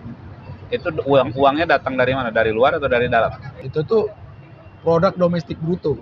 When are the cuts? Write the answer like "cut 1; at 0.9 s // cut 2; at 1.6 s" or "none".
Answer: cut 1; at 3.5 s